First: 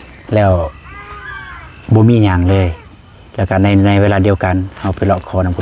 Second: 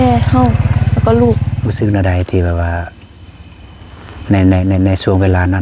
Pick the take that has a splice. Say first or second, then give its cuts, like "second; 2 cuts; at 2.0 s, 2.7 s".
second; 1 cut; at 1.6 s